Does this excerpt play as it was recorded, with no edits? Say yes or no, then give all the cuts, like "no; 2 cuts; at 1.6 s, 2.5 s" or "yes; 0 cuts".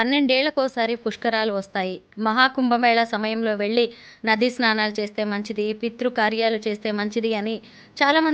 yes; 0 cuts